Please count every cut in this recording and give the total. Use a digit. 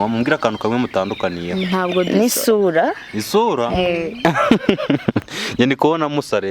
0